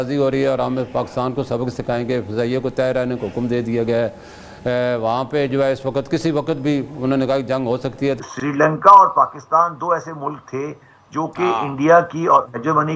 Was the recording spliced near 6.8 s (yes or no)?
no